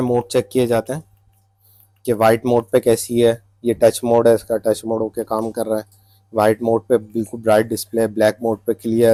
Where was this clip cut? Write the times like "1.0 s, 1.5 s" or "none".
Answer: none

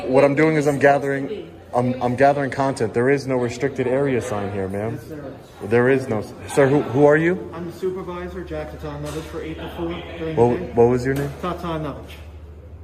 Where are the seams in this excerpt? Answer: none

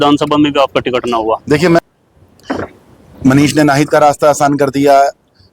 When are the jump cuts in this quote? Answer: 1.8 s

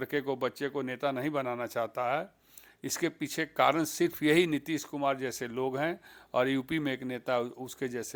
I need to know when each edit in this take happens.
none

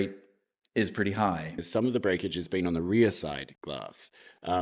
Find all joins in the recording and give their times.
1.6 s

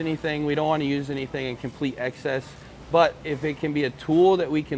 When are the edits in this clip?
none

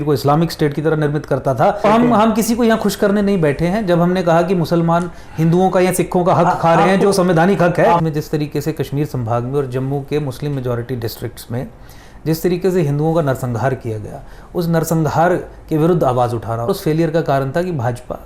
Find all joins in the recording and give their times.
1.8 s, 8.0 s, 16.7 s

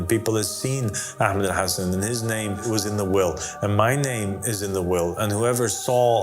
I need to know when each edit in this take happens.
2.6 s

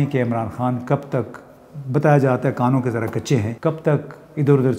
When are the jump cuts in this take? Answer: 3.5 s

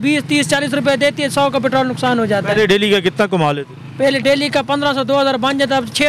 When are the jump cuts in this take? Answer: none

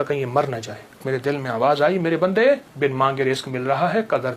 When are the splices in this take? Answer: 1.0 s, 2.7 s

